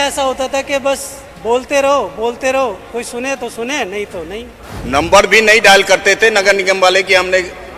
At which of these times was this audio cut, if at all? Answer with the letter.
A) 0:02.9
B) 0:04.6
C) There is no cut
B